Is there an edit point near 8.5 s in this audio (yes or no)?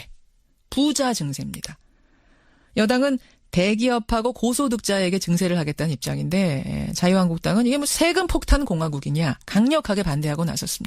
no